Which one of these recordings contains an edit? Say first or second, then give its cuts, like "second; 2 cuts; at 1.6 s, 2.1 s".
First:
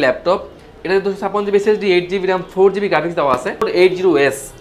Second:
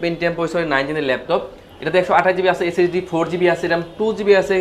first; 1 cut; at 3.6 s